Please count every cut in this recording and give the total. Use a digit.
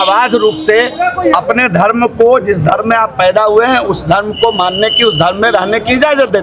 0